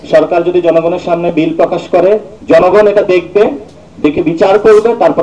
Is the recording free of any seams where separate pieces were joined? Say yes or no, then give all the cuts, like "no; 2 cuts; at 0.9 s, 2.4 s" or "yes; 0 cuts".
no; 1 cut; at 2.3 s